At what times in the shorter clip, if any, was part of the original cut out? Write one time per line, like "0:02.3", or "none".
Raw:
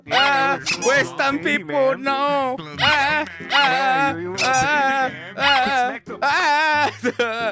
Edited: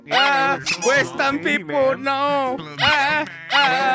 none